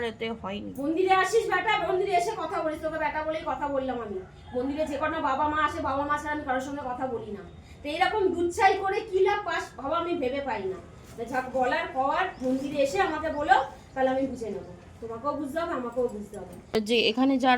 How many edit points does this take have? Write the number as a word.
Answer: one